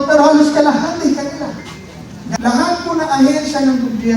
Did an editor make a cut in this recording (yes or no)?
yes